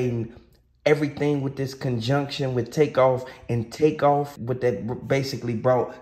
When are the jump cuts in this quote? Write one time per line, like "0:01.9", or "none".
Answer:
0:04.4